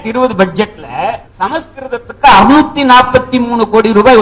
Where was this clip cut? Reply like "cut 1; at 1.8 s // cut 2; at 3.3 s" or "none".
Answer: cut 1; at 1.3 s

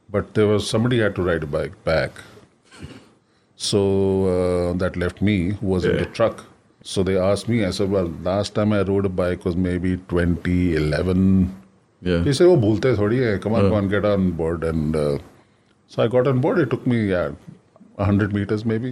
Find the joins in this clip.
cut 1; at 6.7 s

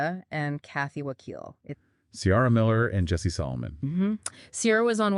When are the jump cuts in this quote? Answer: cut 1; at 1.7 s

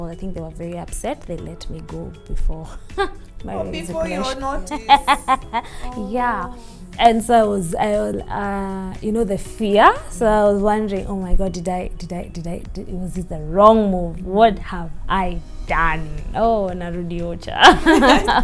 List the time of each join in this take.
none

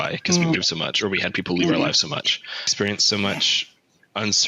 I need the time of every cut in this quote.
cut 1; at 2.7 s

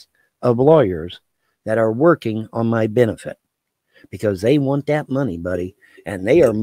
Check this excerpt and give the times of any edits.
none

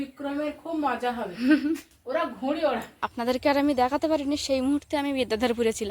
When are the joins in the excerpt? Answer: cut 1; at 3.0 s

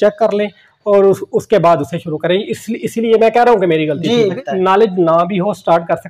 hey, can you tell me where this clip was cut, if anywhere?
cut 1; at 4.4 s

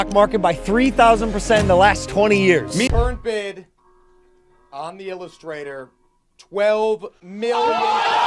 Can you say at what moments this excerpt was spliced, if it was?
cut 1; at 2.9 s

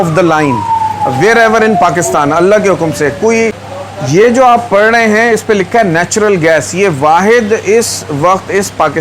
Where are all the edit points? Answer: cut 1; at 3.7 s

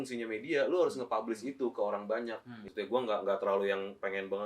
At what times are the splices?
cut 1; at 2.6 s

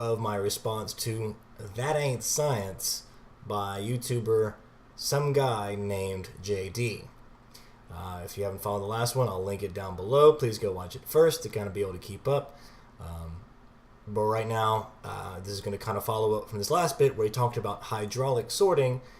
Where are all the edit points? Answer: cut 1; at 12.1 s

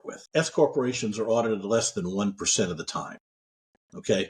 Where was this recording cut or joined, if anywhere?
none

